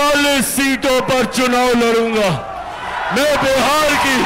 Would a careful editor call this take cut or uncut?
uncut